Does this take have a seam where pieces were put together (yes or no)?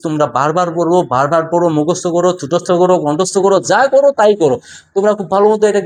no